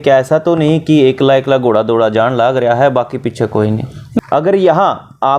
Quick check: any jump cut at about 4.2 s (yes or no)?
yes